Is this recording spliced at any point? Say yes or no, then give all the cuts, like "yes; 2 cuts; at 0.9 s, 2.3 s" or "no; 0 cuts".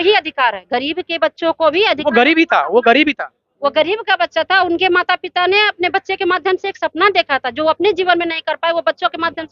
no; 0 cuts